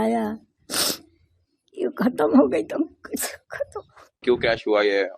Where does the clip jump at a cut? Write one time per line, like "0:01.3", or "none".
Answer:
0:04.2